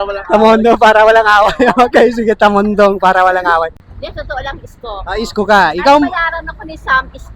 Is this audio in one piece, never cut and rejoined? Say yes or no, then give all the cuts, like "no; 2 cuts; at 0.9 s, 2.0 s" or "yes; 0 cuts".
no; 1 cut; at 3.8 s